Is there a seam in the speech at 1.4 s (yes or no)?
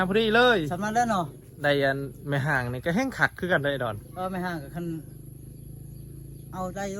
yes